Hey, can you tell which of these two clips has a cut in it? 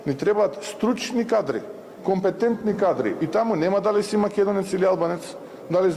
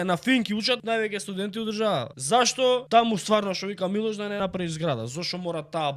second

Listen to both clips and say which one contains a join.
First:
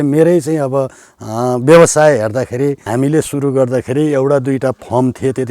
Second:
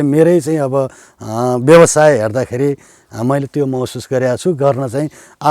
first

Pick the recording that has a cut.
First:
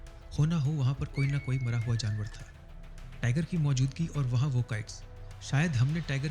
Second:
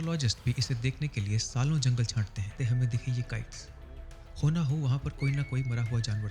second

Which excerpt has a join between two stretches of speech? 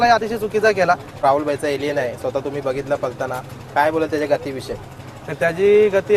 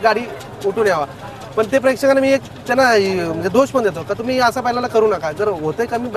first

